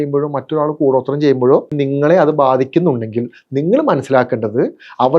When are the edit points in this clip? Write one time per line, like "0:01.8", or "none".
0:01.7